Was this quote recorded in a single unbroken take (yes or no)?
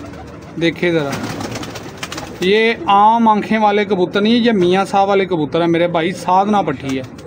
yes